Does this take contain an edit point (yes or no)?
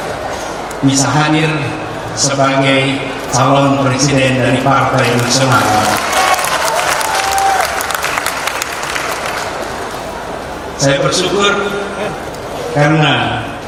no